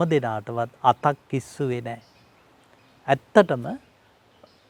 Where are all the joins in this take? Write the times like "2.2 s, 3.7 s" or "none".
none